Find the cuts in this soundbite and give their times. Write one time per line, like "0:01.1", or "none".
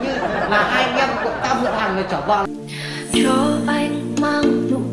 none